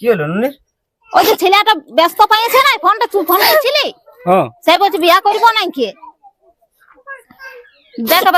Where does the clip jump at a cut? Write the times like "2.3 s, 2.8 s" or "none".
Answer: none